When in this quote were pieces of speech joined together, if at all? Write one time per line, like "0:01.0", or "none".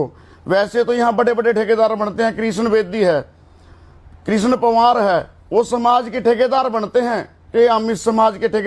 none